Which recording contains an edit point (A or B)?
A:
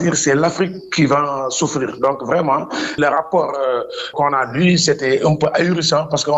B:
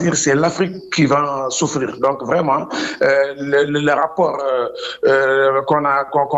A